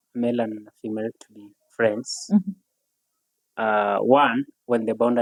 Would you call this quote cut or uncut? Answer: uncut